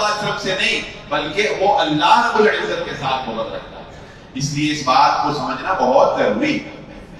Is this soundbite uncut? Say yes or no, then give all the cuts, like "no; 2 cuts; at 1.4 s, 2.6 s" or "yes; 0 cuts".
yes; 0 cuts